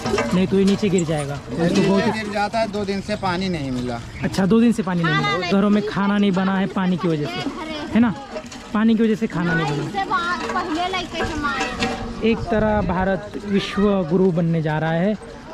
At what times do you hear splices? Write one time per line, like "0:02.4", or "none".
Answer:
none